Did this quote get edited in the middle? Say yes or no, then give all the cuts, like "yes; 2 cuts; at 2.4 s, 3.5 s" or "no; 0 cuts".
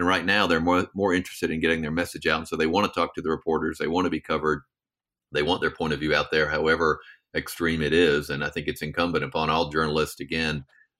no; 0 cuts